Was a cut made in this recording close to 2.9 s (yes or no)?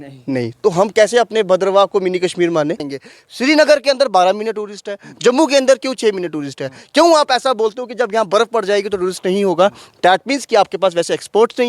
yes